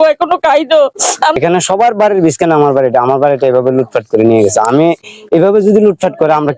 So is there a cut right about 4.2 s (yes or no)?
no